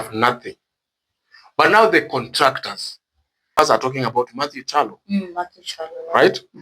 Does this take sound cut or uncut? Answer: cut